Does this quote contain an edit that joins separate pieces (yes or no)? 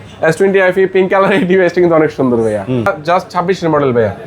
yes